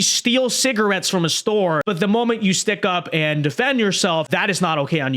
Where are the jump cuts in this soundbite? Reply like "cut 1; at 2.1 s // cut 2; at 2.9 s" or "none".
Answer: cut 1; at 1.8 s // cut 2; at 4.3 s